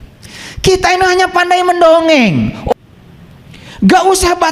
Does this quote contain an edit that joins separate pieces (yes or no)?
yes